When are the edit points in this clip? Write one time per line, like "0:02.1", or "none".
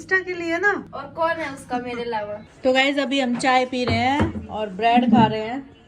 0:02.5